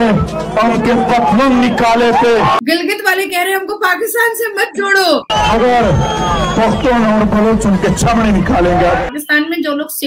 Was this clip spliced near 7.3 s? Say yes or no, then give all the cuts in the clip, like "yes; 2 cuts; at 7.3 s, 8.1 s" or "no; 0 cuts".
no; 3 cuts; at 2.6 s, 5.3 s, 9.1 s